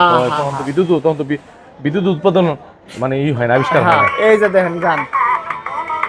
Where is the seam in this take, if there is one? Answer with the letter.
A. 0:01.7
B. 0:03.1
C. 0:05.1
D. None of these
D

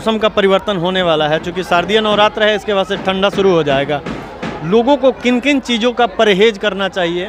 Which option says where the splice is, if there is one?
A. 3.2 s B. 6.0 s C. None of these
C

